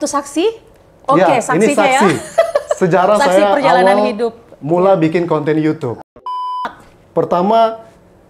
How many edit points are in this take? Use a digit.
1